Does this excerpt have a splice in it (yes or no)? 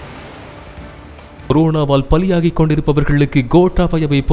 no